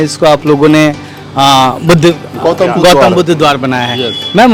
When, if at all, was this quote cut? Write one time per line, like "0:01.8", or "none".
none